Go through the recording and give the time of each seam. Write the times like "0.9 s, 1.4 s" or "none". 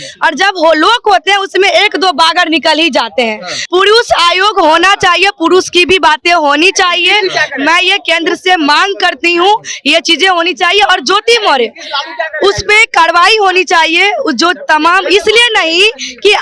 3.5 s